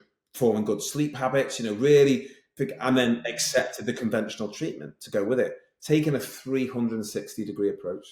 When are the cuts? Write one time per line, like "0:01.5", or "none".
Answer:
none